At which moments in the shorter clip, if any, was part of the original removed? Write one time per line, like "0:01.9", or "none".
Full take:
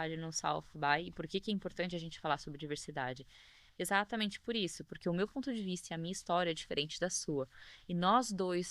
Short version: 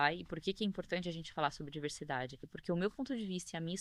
0:02.5